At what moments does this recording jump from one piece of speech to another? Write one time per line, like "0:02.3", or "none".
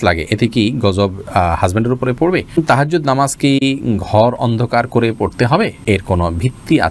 0:02.6
0:05.8